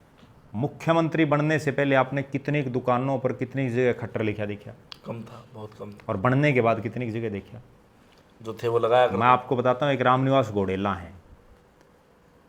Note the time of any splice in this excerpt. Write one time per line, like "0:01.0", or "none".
none